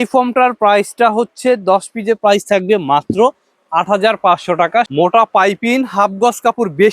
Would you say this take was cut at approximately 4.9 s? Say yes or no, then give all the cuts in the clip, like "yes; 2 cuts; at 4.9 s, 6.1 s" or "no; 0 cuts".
yes; 1 cut; at 4.9 s